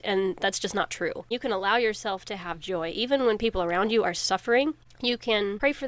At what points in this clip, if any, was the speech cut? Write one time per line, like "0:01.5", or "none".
0:01.3